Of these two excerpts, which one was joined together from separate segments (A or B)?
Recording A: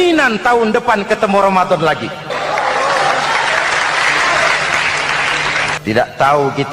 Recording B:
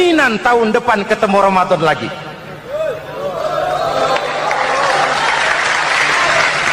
A